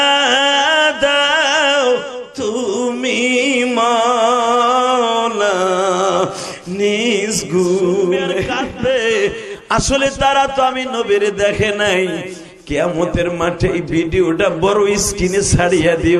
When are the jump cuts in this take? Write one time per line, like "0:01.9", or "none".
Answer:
0:08.6